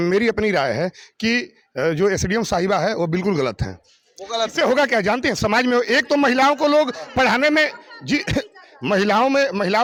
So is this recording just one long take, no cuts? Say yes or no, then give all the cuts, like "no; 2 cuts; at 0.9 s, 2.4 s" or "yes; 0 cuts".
yes; 0 cuts